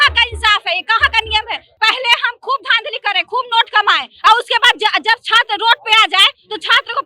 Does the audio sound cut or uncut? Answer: cut